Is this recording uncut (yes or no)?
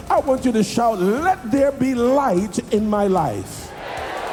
yes